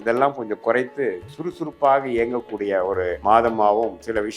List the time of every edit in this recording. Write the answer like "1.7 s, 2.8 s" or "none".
3.2 s